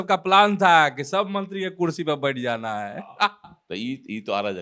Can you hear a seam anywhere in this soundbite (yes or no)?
no